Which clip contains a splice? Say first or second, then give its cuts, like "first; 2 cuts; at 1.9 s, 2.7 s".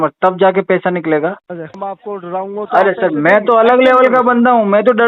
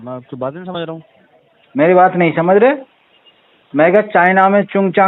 first; 1 cut; at 1.8 s